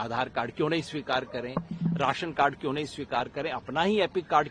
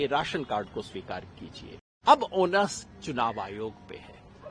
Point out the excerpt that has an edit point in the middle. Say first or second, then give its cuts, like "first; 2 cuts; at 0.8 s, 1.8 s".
second; 1 cut; at 1.9 s